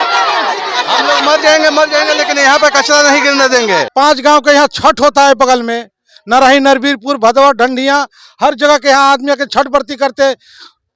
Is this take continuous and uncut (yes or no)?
no